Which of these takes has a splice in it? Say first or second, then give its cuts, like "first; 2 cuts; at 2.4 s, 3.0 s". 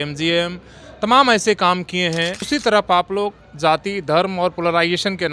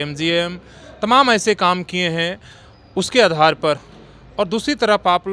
first; 1 cut; at 2.4 s